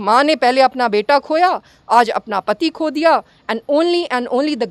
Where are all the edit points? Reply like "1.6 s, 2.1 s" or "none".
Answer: none